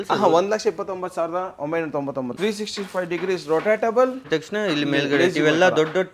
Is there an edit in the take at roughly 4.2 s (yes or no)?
yes